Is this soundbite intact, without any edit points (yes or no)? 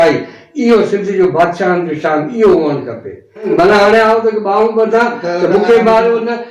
no